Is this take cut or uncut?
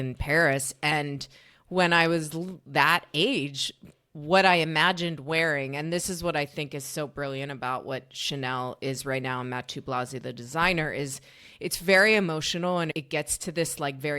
cut